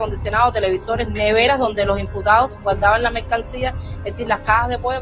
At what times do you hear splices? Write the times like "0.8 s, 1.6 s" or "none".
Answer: none